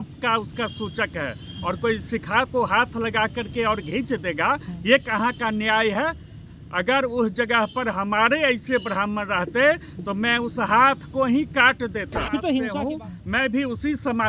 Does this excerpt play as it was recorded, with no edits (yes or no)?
no